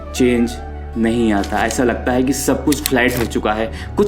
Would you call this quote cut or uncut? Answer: uncut